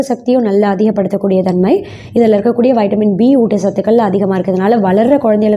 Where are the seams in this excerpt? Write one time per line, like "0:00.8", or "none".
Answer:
none